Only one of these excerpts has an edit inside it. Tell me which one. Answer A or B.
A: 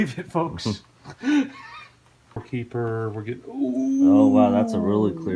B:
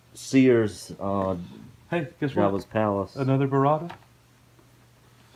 A